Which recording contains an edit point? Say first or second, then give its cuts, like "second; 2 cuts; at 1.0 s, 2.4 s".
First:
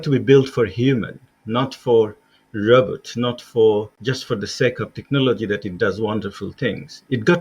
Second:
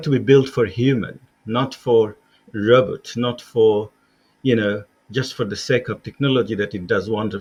first; 1 cut; at 4.0 s